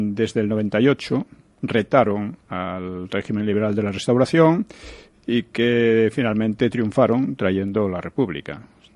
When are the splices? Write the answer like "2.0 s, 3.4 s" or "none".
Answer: 4.0 s